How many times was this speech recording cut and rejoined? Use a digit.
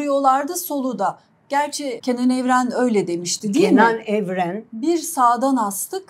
1